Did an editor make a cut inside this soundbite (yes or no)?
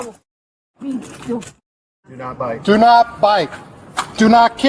no